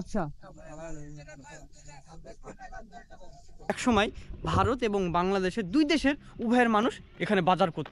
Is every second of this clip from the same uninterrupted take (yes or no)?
no